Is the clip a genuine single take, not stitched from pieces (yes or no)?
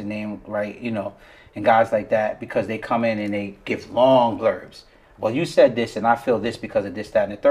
yes